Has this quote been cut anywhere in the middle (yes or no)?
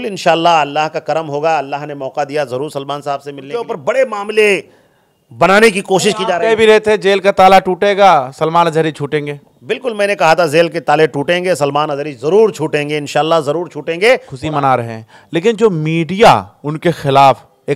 yes